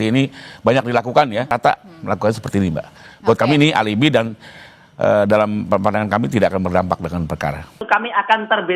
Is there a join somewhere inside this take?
yes; 1 cut; at 7.8 s

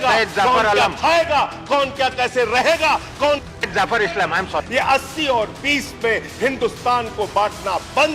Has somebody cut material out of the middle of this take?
yes; 1 cut; at 4.6 s

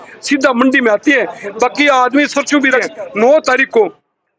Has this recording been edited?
yes; 1 cut; at 2.8 s

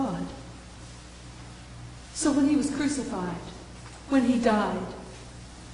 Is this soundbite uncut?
yes; 0 cuts

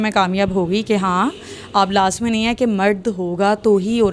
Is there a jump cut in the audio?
no; 0 cuts

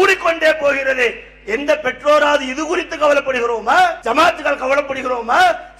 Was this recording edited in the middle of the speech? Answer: yes; 1 cut; at 4.0 s

